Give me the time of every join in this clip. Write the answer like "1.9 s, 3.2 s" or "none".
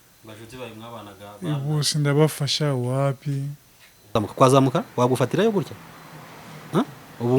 4.1 s